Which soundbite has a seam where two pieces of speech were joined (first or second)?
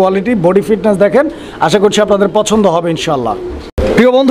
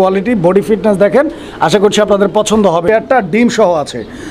second